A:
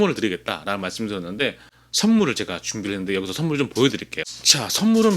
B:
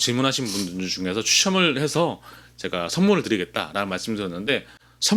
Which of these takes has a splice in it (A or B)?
A